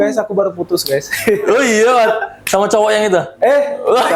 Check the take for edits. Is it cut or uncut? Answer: uncut